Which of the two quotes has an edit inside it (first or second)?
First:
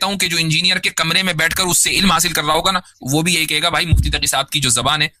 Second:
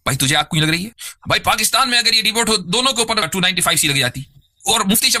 second